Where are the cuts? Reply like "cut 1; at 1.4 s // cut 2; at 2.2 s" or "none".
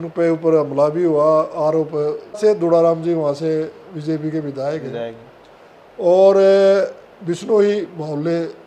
cut 1; at 2.4 s